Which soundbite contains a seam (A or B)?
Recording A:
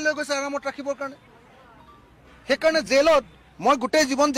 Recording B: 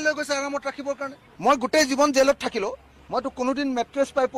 B